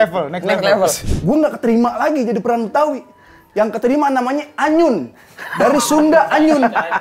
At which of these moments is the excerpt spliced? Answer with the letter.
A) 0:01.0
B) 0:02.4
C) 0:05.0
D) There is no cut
A